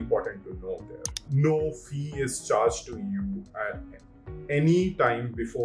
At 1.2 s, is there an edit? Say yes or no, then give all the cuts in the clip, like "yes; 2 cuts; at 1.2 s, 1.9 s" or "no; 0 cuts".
yes; 1 cut; at 1.2 s